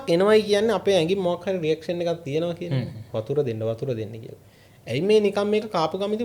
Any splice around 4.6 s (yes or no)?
no